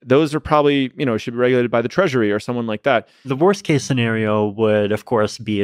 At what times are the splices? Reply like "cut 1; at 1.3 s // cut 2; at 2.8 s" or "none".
cut 1; at 3.2 s